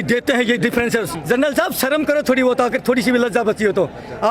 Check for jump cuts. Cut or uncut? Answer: cut